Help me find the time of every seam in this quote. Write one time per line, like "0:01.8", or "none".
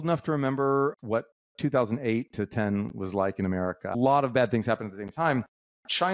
0:00.9
0:03.9